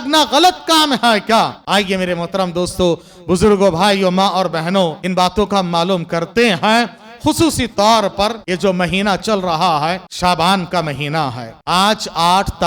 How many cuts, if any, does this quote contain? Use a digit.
5